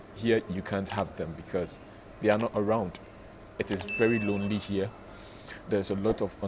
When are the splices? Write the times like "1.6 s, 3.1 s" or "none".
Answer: 3.4 s